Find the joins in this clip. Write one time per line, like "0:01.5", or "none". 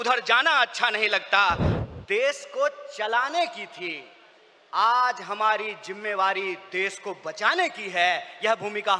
0:01.7

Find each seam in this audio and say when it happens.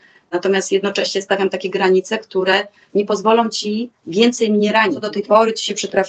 0:05.0

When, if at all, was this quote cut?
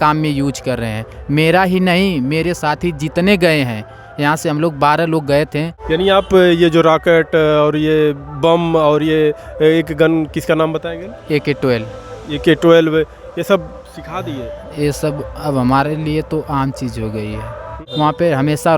0:05.8
0:17.7

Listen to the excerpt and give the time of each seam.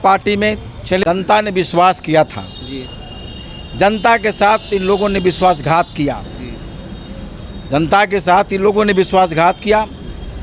0:01.0

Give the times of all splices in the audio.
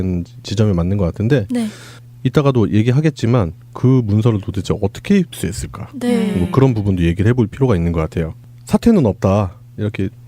0:05.8

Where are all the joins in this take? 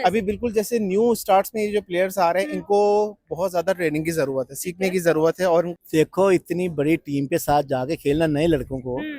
0:05.7

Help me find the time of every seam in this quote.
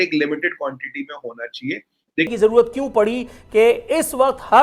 0:02.3

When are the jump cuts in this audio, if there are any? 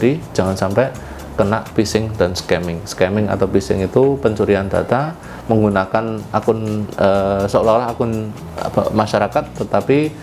none

